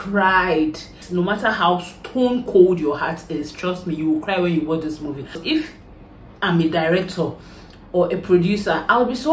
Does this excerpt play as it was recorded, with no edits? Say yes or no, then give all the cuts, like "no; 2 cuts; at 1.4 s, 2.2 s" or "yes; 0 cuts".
no; 2 cuts; at 1.0 s, 5.4 s